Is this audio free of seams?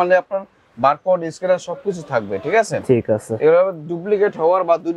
yes; 0 cuts

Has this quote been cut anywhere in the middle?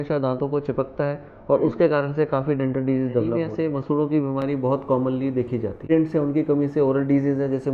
yes; 2 cuts; at 3.5 s, 5.8 s

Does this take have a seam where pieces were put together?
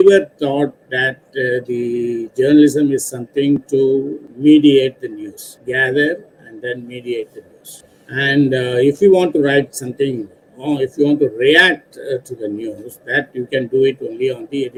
no; 0 cuts

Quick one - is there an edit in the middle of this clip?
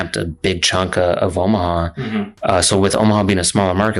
no; 0 cuts

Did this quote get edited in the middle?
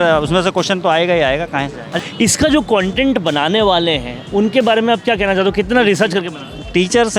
yes; 1 cut; at 1.8 s

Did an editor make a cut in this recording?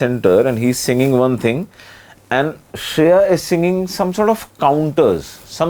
no; 0 cuts

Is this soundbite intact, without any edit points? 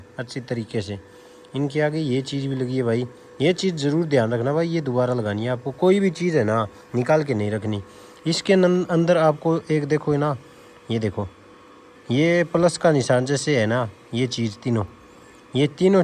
yes; 0 cuts

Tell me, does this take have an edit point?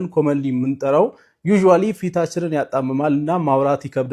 no; 0 cuts

